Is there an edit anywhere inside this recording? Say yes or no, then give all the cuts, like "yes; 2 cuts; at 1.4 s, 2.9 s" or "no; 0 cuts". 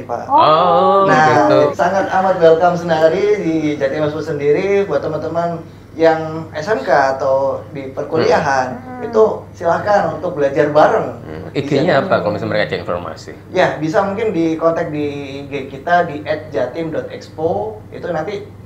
yes; 1 cut; at 1.7 s